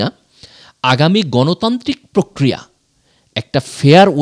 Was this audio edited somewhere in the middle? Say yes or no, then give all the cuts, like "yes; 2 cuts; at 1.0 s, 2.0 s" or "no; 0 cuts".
no; 0 cuts